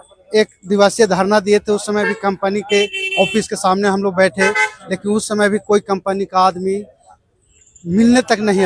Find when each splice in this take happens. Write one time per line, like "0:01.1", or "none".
none